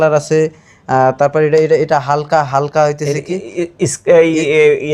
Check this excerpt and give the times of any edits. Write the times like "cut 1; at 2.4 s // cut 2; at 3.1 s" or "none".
none

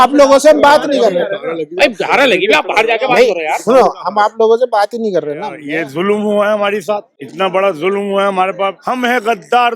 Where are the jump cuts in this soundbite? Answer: cut 1; at 5.6 s // cut 2; at 7.2 s // cut 3; at 8.8 s

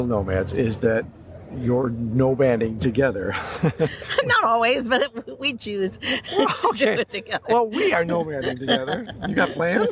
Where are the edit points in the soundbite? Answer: none

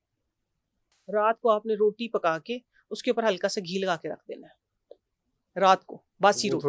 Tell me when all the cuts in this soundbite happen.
cut 1; at 0.9 s

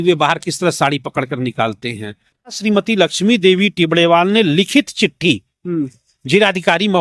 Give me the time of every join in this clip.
cut 1; at 2.6 s

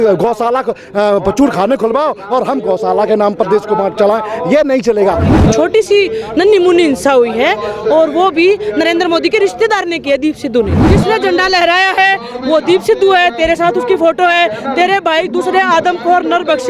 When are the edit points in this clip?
cut 1; at 5.3 s // cut 2; at 10.8 s

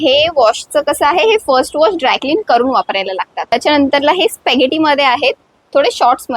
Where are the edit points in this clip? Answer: cut 1; at 3.5 s

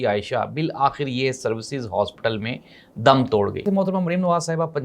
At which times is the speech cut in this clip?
cut 1; at 3.6 s

